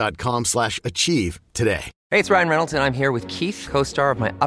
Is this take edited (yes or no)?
yes